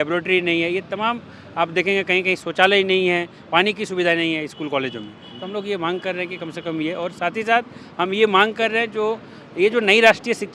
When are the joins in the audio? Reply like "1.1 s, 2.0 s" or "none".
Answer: none